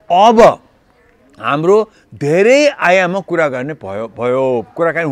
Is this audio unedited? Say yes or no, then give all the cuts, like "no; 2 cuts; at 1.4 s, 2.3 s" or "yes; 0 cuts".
yes; 0 cuts